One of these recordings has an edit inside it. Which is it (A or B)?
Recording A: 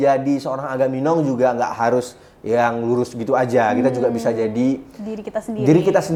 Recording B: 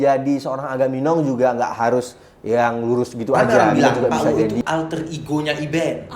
B